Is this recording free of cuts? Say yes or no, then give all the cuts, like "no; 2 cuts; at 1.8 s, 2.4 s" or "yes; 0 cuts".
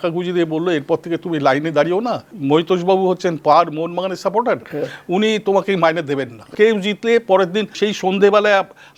no; 3 cuts; at 2.3 s, 6.5 s, 7.7 s